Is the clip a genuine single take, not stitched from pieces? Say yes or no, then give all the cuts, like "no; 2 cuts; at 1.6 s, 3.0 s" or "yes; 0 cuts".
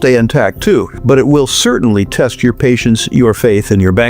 no; 1 cut; at 0.9 s